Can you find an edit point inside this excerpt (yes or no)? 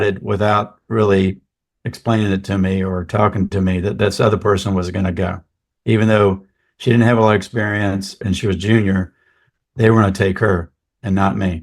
no